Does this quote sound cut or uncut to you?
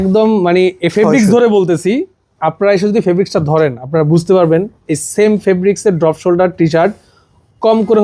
uncut